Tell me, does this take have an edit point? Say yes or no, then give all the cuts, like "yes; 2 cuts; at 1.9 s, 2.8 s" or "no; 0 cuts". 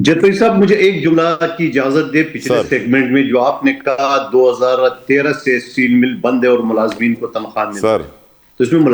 no; 0 cuts